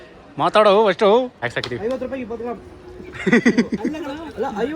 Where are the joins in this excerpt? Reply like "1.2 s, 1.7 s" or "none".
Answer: 1.4 s